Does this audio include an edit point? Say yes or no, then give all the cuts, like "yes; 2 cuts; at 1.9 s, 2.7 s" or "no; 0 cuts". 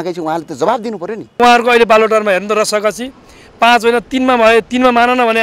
yes; 1 cut; at 1.4 s